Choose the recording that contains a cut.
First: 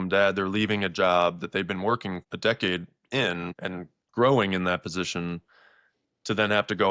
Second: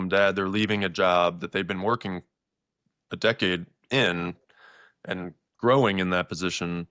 first; 2 cuts; at 2.3 s, 3.6 s

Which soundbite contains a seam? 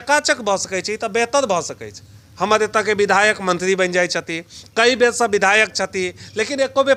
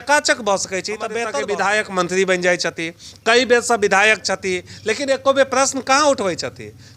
second; 1 cut; at 1.3 s

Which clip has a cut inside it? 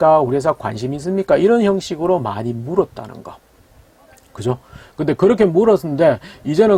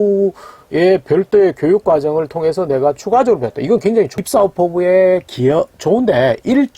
second; 1 cut; at 4.1 s

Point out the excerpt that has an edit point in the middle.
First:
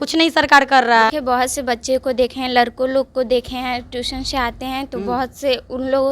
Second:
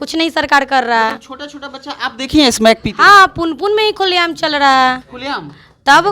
first; 1 cut; at 1.2 s

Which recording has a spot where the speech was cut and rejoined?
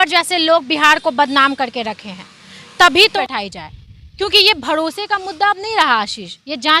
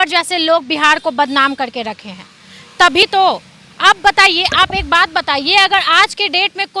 first; 1 cut; at 3.0 s

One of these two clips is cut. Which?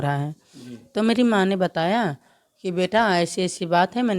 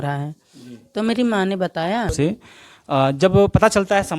second; 1 cut; at 2.1 s

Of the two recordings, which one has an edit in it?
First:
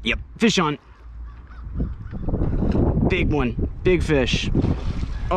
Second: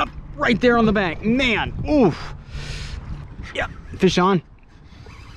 second; 1 cut; at 3.3 s

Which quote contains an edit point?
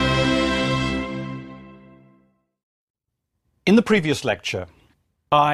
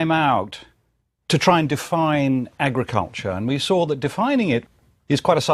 second; 1 cut; at 3.1 s

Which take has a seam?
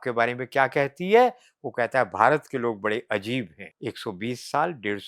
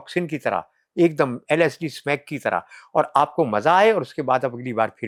first; 1 cut; at 3.6 s

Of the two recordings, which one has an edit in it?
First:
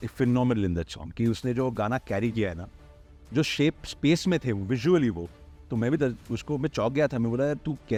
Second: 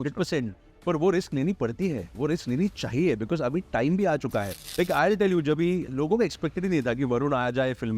second; 1 cut; at 4.6 s

